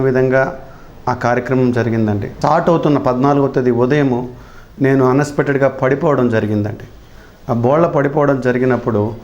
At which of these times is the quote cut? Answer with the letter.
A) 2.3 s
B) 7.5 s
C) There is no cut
A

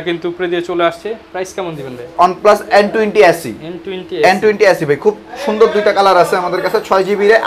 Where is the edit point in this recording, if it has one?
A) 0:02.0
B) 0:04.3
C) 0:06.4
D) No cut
A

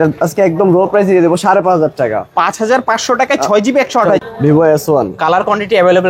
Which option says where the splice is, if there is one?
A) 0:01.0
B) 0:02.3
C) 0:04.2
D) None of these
C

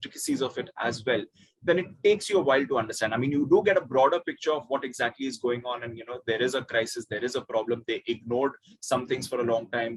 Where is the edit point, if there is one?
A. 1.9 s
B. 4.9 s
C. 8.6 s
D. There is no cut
D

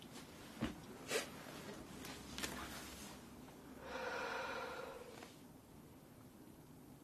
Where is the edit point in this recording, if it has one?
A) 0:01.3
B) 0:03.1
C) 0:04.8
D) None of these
B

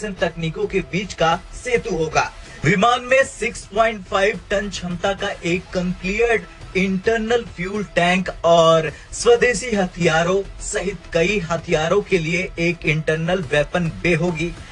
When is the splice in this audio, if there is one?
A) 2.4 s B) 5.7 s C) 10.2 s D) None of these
A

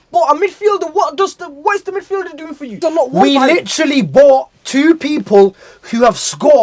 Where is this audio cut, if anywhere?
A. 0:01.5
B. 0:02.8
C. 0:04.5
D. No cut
B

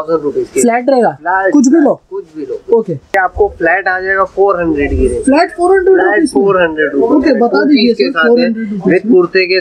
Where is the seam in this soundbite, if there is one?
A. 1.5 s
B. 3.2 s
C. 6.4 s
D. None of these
B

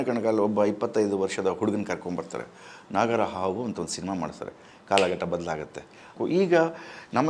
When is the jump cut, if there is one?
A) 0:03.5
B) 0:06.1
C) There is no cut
B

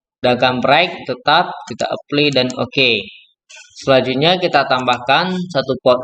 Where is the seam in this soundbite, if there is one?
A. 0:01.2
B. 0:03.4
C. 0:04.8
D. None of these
D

